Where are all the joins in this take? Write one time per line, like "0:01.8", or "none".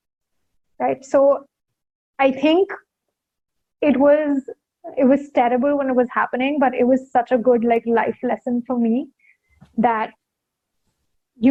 none